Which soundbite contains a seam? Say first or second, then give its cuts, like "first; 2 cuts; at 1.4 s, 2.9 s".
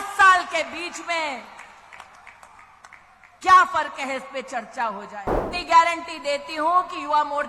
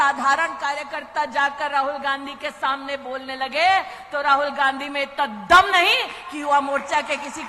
first; 1 cut; at 5.5 s